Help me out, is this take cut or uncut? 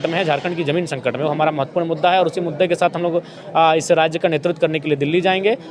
uncut